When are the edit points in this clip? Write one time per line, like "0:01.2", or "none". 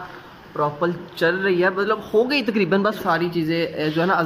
0:03.0